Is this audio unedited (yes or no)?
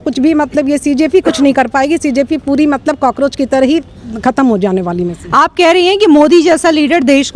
yes